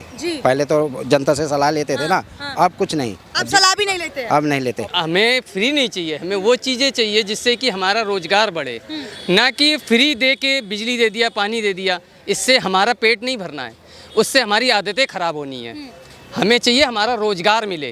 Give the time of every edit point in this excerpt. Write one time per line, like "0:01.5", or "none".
0:04.7